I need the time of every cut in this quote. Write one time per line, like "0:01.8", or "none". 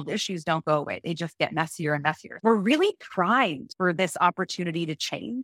0:02.3
0:03.6